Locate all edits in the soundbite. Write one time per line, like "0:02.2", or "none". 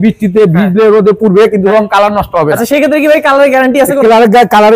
none